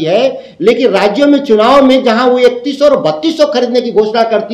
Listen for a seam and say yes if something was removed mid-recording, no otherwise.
no